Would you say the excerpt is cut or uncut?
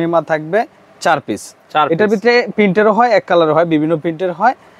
uncut